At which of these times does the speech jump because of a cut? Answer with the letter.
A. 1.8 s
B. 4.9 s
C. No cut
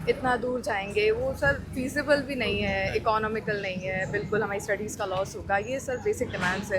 C